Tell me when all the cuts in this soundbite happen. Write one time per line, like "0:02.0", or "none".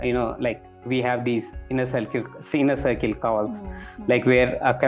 none